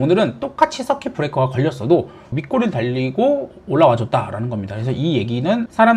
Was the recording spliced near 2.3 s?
yes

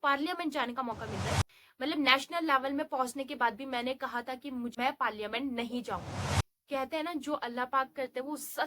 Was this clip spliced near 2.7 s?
no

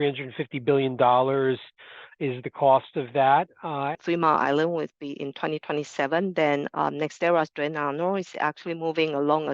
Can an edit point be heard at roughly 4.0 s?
yes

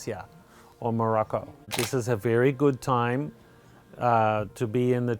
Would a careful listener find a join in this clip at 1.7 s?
yes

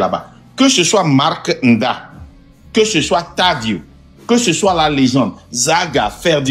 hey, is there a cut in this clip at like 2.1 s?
no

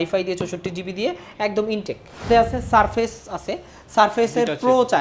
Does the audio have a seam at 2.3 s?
yes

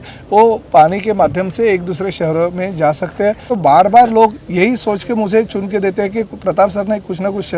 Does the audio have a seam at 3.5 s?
yes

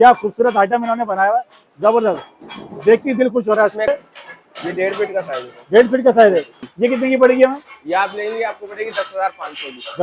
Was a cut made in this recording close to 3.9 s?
yes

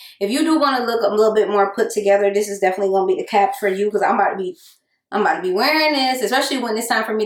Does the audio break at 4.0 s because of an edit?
no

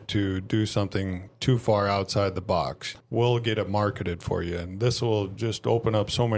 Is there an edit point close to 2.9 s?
yes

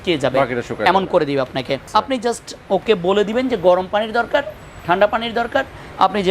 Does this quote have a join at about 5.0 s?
no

